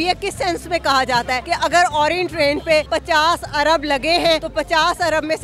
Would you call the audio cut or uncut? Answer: cut